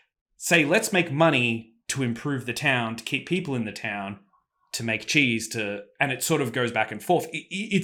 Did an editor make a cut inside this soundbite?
no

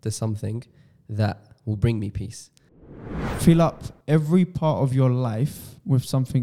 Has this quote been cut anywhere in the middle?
yes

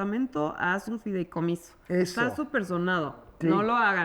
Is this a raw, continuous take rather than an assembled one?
yes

